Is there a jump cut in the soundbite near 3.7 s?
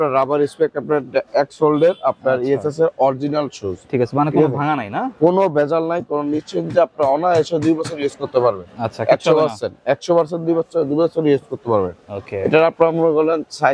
no; 0 cuts

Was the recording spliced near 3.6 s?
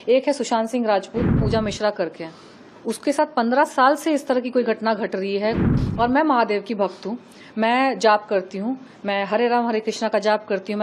no; 2 cuts; at 1.4 s, 5.7 s

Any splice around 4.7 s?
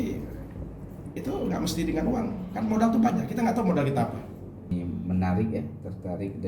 yes; 1 cut; at 4.7 s

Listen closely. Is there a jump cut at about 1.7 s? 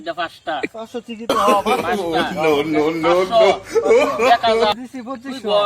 no; 1 cut; at 4.7 s

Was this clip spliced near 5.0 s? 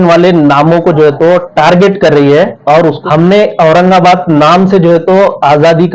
no; 1 cut; at 3.0 s

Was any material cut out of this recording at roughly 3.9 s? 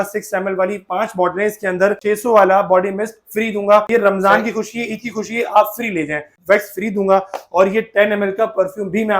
yes; 3 cuts; at 2.0 s, 3.9 s, 6.3 s

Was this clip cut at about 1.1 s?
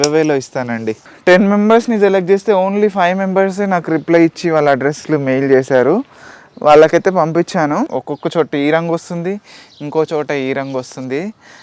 yes; 2 cuts; at 1.1 s, 7.9 s

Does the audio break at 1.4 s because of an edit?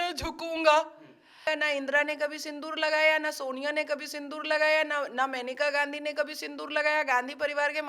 yes; 1 cut; at 1.4 s

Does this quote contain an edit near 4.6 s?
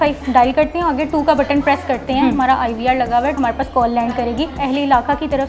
yes; 2 cuts; at 3.4 s, 4.6 s

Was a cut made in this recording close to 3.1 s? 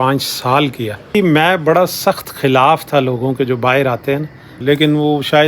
no; 2 cuts; at 1.1 s, 4.5 s

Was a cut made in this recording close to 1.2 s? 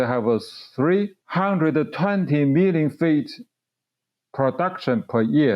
yes; 1 cut; at 1.2 s

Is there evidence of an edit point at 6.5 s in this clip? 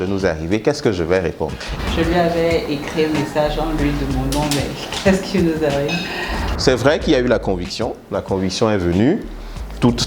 yes; 2 cuts; at 1.6 s, 6.5 s

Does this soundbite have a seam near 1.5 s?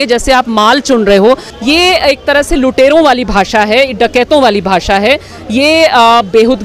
yes; 1 cut; at 1.5 s

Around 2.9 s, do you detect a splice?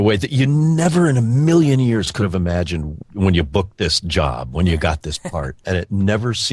yes; 2 cuts; at 2.9 s, 5.6 s

